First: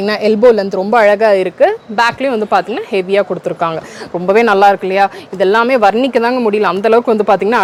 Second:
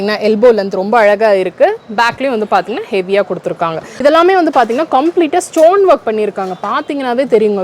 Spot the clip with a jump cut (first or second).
second